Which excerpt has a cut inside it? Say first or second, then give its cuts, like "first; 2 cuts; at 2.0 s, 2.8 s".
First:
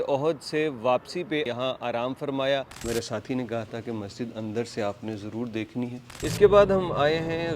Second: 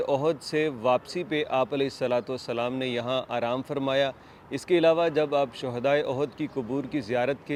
first; 3 cuts; at 1.5 s, 2.8 s, 6.2 s